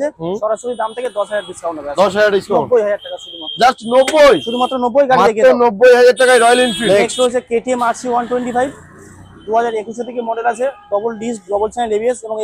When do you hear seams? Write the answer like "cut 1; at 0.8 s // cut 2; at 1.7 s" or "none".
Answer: cut 1; at 6.8 s